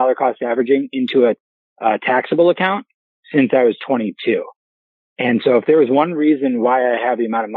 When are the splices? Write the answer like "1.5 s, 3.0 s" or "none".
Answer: none